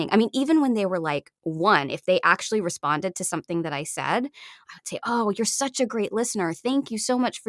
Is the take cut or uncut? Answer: uncut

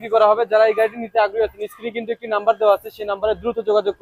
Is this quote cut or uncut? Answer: uncut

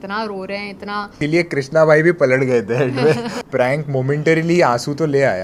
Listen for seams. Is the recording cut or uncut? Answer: cut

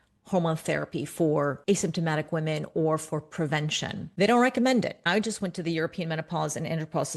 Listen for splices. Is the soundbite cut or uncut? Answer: cut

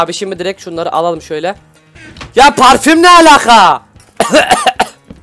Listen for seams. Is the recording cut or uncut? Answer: uncut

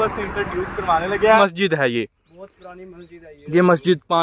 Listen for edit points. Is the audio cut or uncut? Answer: cut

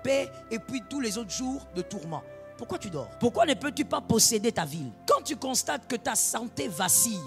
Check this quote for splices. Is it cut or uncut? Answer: cut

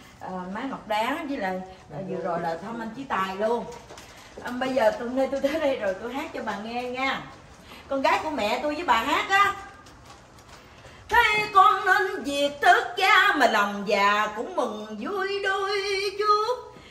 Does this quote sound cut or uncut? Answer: uncut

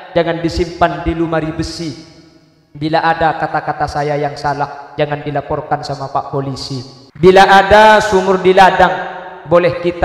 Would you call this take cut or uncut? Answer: cut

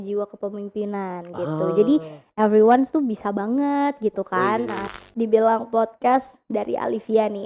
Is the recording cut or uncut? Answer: cut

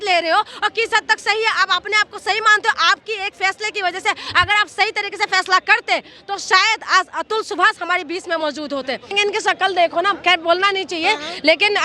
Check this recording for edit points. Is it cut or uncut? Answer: cut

